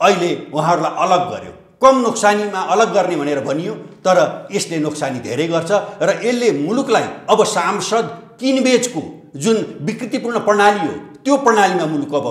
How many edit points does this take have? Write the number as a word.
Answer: zero